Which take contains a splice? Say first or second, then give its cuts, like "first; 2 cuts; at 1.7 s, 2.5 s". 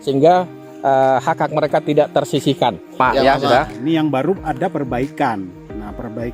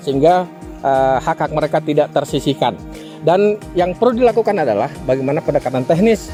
first; 1 cut; at 3.0 s